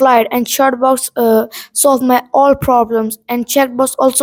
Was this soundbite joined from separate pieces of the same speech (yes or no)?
no